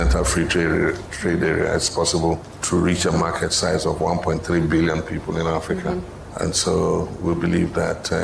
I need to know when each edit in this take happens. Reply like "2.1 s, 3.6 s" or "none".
2.5 s, 6.2 s